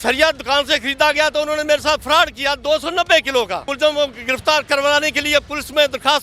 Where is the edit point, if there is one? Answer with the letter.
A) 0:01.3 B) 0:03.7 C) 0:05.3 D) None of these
B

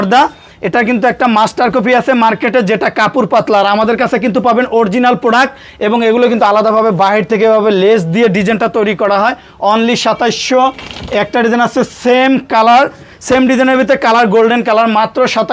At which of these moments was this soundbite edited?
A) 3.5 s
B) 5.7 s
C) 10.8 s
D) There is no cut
D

